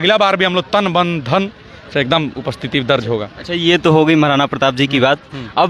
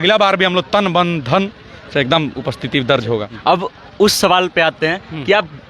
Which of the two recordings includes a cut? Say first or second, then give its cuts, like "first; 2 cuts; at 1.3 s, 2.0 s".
second; 1 cut; at 3.3 s